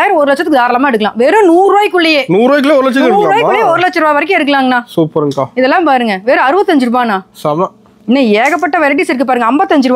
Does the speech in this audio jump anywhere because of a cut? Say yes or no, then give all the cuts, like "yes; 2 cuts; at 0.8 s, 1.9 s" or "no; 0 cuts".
no; 0 cuts